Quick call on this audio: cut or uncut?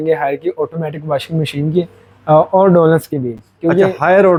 uncut